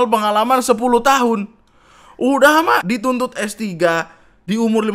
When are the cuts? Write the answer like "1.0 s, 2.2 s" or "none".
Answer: 2.8 s